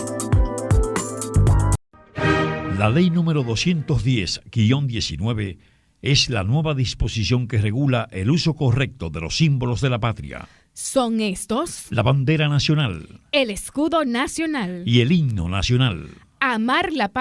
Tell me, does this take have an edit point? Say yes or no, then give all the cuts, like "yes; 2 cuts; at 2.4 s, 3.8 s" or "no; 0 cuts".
yes; 1 cut; at 1.9 s